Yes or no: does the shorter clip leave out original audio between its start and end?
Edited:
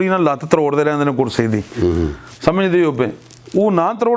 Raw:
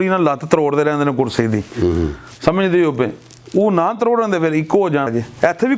no